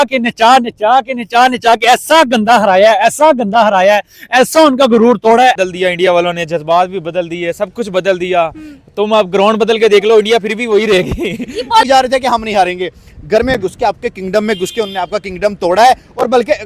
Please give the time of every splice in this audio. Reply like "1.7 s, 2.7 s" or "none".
5.6 s, 11.9 s